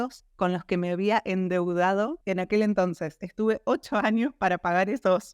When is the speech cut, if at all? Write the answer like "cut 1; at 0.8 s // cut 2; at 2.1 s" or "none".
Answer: cut 1; at 2.2 s